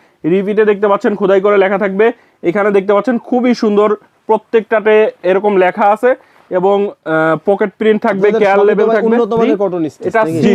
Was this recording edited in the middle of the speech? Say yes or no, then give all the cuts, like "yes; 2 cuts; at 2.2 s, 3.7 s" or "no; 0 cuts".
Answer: no; 0 cuts